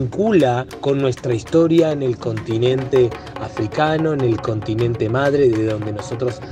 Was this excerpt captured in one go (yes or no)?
yes